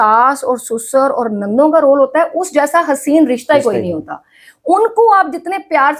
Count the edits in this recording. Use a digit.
0